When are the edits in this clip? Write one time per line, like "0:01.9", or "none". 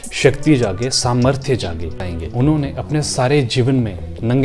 0:02.1